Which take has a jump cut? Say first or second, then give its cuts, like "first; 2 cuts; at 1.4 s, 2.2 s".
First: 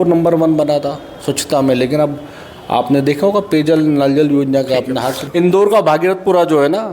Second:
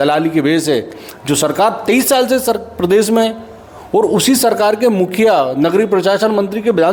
first; 1 cut; at 5.2 s